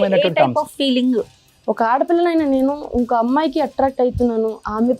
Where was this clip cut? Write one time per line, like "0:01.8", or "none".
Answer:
0:01.3